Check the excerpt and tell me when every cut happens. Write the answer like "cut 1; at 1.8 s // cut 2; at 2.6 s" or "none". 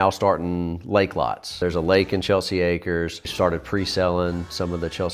cut 1; at 1.5 s // cut 2; at 3.3 s